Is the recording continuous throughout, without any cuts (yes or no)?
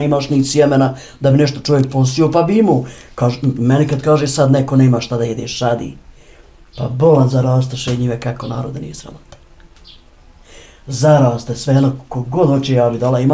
yes